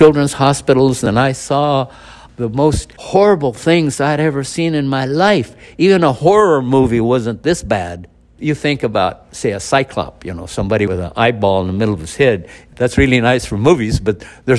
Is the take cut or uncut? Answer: cut